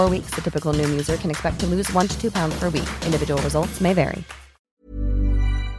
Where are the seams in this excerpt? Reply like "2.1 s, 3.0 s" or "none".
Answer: 4.7 s

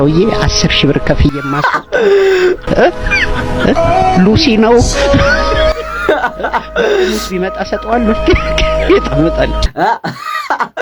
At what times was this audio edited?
9.6 s

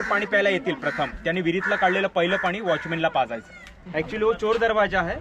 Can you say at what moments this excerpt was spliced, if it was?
3.8 s

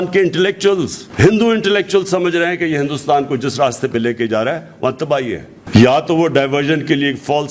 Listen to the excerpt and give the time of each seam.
5.5 s

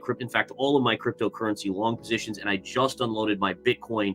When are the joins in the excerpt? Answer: none

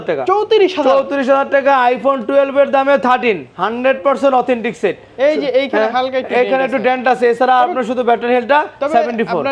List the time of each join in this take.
none

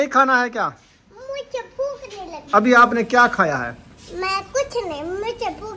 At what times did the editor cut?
none

